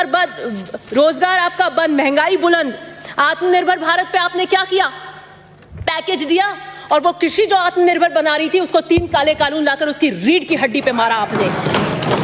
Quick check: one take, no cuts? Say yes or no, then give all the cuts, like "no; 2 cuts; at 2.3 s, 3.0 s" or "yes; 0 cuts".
yes; 0 cuts